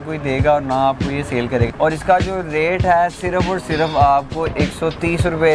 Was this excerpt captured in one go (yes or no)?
no